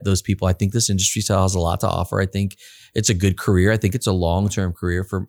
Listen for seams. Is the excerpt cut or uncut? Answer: uncut